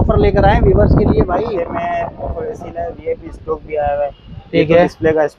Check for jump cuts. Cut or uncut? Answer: uncut